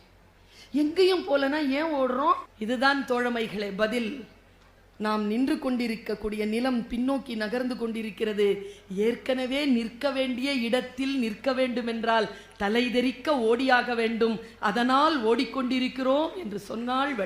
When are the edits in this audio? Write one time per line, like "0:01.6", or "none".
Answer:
0:02.5